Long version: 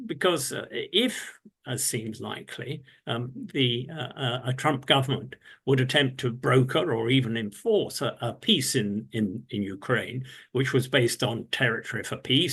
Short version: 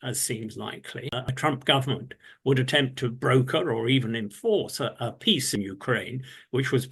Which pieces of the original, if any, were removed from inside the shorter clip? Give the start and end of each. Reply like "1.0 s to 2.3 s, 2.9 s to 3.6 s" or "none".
2.9 s to 4.5 s, 8.7 s to 9.5 s